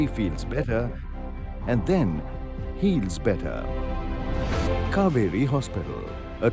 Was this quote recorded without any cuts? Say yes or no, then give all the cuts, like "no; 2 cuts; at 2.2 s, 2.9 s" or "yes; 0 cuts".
yes; 0 cuts